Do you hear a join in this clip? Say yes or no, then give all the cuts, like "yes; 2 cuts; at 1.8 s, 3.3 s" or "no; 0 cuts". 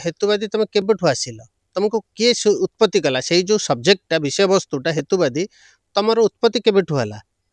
no; 0 cuts